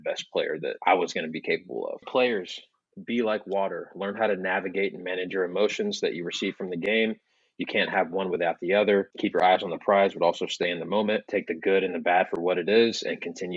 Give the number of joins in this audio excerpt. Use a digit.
1